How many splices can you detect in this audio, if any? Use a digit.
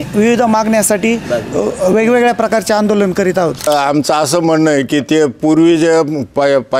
1